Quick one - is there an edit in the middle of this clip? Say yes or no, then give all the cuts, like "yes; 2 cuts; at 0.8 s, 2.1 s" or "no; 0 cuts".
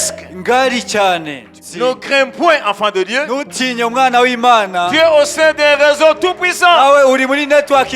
yes; 1 cut; at 1.5 s